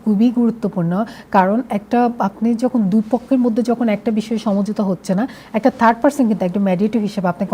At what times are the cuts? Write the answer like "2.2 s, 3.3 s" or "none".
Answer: none